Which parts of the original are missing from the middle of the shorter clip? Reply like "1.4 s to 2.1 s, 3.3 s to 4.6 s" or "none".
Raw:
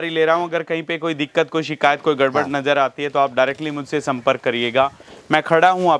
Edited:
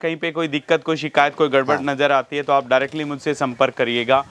none